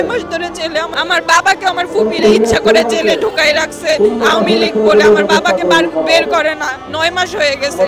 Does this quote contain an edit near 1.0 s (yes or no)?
yes